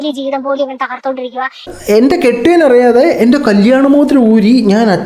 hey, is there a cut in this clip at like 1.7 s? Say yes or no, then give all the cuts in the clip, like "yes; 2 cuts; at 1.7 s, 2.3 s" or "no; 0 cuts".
yes; 1 cut; at 1.7 s